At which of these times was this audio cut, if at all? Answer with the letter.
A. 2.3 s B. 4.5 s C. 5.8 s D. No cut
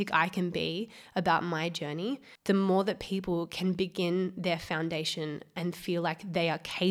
A